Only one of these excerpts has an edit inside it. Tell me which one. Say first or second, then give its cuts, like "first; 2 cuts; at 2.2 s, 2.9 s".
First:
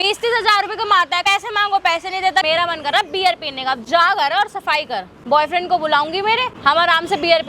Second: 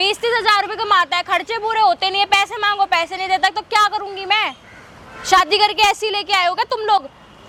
first; 4 cuts; at 1.2 s, 2.4 s, 5.1 s, 6.5 s